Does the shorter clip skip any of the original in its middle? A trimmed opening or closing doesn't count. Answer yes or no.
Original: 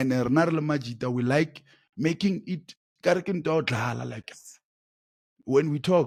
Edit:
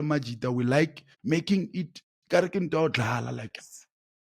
yes